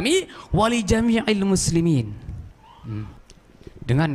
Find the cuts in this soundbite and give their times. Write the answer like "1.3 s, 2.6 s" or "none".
3.2 s